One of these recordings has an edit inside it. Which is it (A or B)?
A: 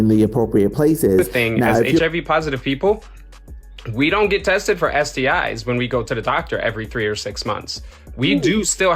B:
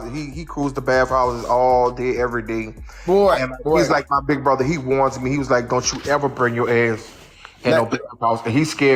A